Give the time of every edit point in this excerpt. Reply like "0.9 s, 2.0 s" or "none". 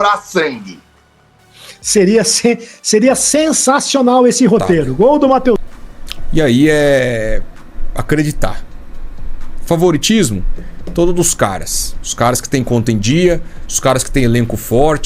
5.6 s